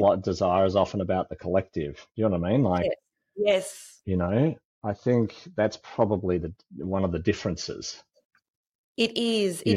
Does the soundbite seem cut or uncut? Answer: uncut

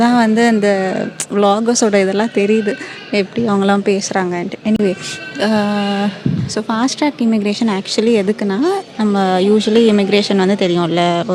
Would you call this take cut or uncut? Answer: uncut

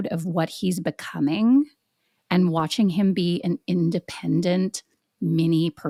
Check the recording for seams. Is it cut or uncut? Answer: uncut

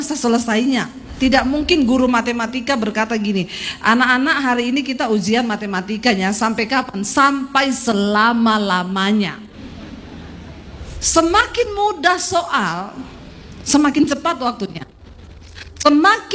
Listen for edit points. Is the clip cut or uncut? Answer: cut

